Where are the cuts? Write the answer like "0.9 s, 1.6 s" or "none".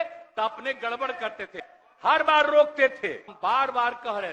1.7 s, 3.3 s